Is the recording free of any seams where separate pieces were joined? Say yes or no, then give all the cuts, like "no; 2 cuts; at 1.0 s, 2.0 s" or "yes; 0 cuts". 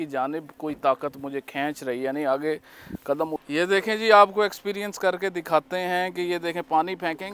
no; 1 cut; at 3.4 s